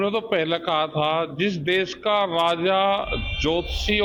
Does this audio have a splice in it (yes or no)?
no